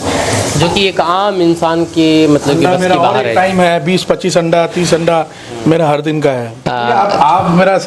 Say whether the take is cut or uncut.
cut